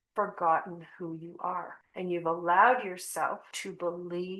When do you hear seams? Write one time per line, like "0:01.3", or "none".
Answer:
0:01.8
0:03.5